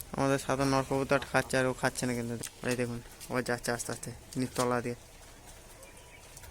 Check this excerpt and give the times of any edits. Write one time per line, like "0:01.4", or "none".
0:02.4

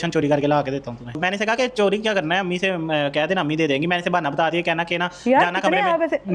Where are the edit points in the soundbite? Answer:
0:01.1

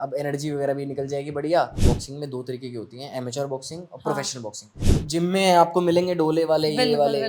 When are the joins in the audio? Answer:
0:01.8
0:04.8

